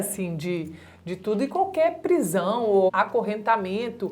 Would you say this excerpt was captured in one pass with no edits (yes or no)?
no